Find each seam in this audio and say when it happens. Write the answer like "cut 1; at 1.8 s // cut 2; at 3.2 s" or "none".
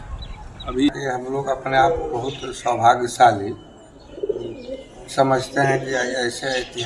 cut 1; at 1.0 s